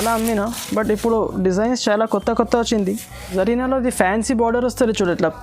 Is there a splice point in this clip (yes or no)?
yes